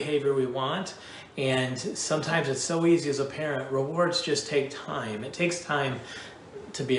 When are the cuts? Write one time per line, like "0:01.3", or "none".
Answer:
none